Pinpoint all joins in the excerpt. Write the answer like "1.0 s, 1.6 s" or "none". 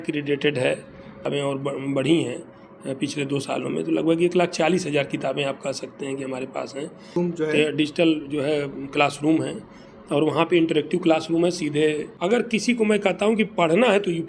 1.2 s, 7.2 s, 12.1 s